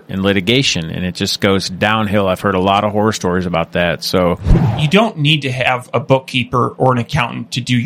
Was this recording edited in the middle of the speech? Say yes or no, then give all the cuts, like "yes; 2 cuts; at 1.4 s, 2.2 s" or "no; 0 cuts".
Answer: yes; 1 cut; at 4.5 s